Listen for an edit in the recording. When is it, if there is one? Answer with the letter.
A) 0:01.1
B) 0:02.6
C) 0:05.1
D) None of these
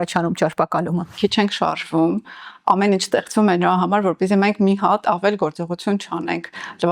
A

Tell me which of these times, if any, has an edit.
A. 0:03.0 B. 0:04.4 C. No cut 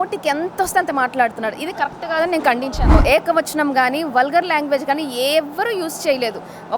A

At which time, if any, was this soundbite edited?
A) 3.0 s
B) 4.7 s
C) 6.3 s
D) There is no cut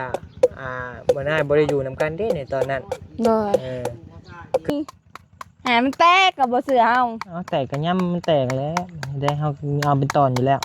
B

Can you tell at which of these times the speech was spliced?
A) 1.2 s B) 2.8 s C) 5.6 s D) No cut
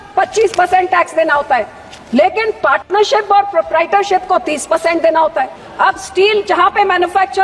C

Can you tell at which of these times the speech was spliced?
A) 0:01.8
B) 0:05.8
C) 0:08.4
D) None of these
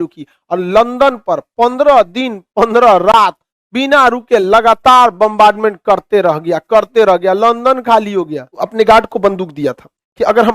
C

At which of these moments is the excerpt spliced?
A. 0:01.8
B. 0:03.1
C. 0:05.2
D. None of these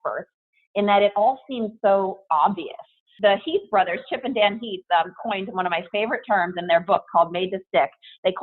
B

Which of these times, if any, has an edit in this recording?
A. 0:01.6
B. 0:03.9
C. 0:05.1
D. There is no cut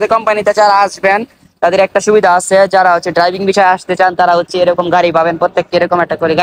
D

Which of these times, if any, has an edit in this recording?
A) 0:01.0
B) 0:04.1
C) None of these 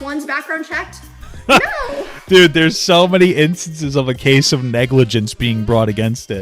C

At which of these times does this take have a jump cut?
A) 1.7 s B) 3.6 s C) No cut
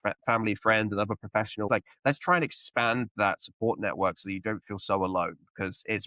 A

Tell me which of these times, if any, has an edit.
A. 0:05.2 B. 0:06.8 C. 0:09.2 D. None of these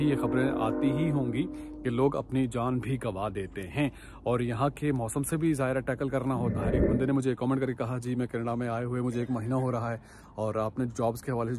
B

